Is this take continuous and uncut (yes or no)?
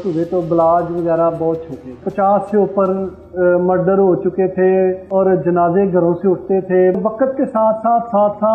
no